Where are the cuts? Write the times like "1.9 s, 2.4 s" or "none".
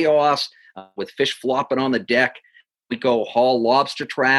none